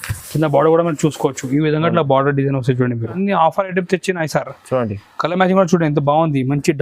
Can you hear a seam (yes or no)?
yes